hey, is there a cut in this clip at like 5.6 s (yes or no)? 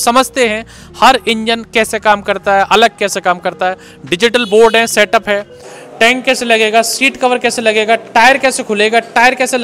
yes